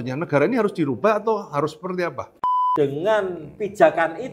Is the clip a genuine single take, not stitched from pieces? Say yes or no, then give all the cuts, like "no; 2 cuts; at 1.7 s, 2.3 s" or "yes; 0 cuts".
no; 1 cut; at 2.3 s